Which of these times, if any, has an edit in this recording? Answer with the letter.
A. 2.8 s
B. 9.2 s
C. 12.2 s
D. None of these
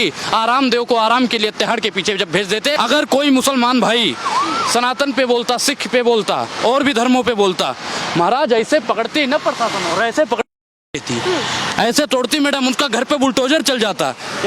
A